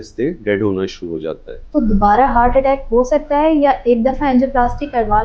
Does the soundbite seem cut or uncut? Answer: cut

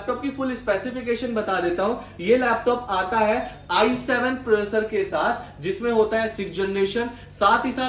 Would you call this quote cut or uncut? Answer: uncut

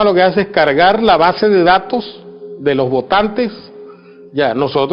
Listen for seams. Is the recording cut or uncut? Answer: uncut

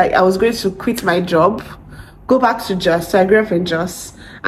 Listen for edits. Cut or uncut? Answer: uncut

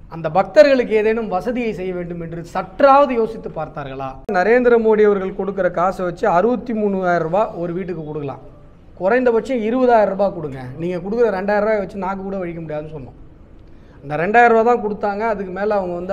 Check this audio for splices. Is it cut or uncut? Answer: cut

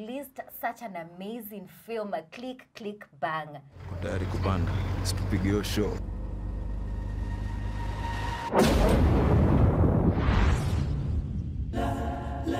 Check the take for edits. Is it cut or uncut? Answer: uncut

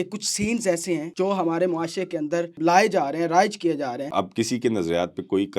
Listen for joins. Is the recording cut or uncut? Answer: cut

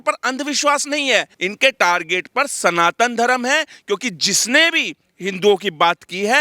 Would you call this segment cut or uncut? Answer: cut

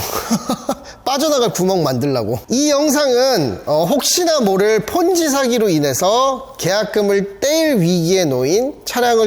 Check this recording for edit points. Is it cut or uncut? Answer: cut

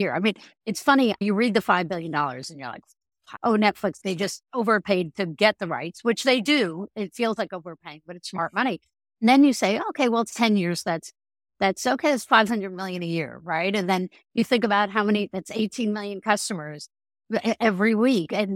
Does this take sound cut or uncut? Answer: cut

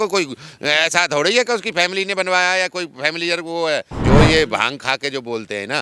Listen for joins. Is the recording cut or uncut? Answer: cut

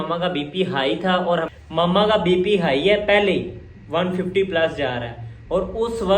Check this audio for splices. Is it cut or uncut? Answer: cut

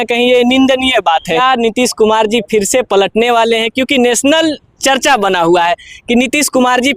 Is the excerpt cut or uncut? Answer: cut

